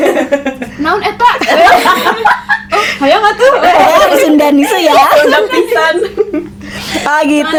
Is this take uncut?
yes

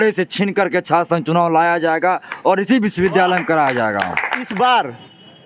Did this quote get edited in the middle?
yes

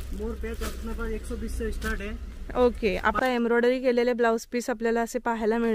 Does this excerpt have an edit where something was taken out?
yes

